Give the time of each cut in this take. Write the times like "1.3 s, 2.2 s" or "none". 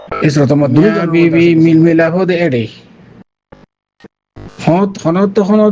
1.0 s